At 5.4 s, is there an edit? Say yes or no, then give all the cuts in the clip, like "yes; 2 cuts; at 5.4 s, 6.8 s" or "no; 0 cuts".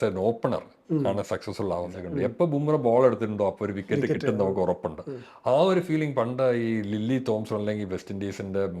no; 1 cut; at 2.0 s